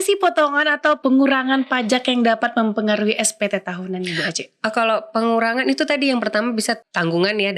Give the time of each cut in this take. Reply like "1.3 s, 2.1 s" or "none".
1.0 s, 6.8 s